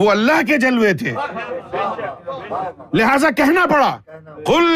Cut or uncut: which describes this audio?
cut